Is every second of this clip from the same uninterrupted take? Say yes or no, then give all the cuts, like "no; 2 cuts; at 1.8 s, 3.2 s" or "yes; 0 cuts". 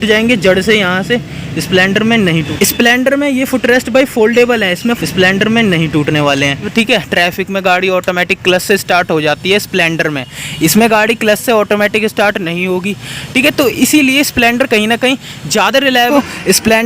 no; 4 cuts; at 2.5 s, 5.0 s, 6.7 s, 16.1 s